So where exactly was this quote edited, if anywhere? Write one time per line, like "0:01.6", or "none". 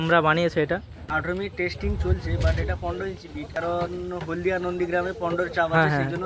0:01.1
0:03.6